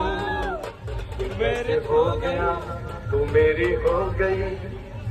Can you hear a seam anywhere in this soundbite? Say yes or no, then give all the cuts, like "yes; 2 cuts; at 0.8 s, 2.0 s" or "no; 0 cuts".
no; 0 cuts